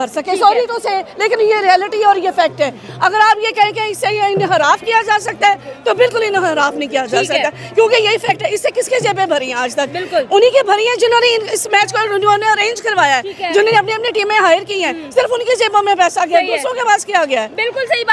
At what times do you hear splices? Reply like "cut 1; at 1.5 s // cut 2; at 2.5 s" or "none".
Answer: none